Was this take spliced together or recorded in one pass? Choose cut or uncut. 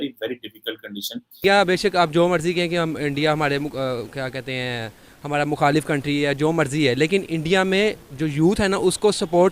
cut